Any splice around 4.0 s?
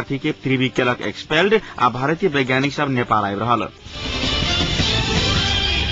yes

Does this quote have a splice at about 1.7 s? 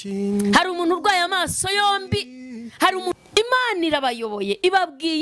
no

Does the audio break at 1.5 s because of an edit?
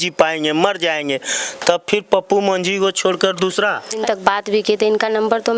no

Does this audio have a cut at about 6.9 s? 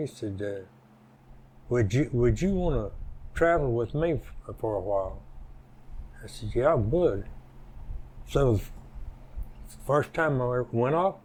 no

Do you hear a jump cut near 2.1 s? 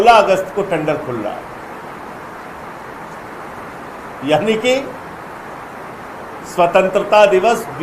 no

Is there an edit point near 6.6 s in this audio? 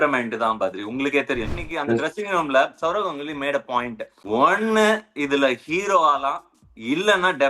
no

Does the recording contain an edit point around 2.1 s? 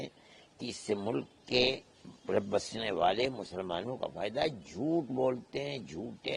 no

